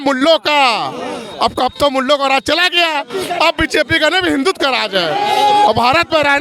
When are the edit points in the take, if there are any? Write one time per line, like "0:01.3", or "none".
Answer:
none

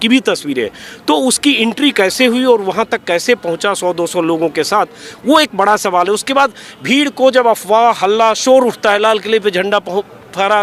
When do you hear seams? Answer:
none

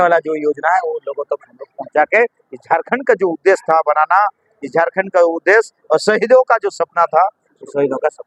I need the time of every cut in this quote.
none

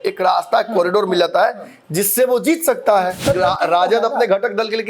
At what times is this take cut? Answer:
0:03.2

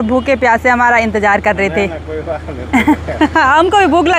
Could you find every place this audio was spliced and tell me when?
none

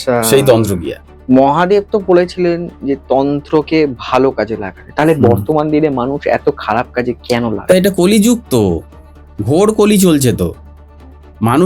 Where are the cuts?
0:01.2

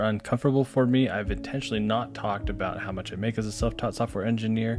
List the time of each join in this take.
none

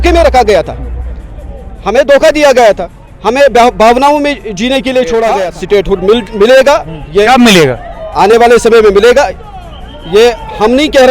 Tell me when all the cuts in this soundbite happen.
0:05.5

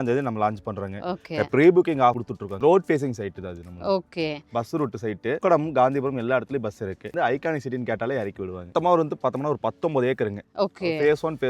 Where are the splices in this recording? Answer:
0:02.2
0:05.4
0:07.1
0:08.7

